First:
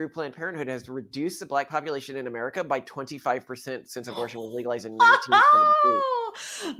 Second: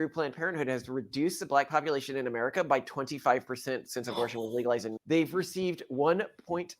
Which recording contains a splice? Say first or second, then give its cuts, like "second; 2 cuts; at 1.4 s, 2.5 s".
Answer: second; 1 cut; at 4.9 s